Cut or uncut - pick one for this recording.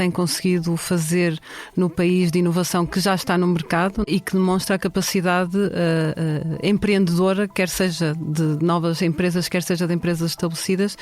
cut